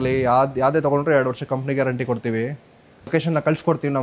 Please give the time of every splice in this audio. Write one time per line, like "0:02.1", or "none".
0:03.0